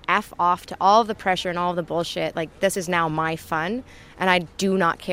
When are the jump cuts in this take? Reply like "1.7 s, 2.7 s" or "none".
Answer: none